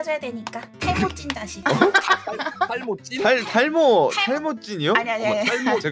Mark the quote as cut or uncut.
uncut